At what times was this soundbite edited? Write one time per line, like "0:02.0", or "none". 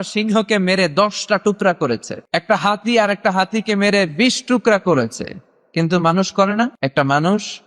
0:02.1
0:06.7